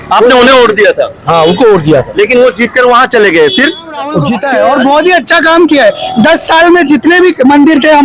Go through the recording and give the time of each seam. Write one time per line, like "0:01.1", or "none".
0:04.1